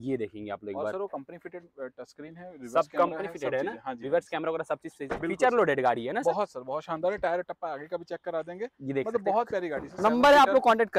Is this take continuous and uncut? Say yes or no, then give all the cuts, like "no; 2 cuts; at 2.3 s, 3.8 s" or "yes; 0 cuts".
yes; 0 cuts